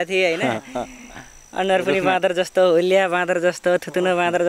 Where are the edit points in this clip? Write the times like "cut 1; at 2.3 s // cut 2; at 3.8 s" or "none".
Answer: none